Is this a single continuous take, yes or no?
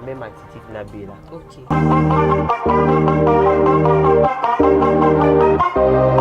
yes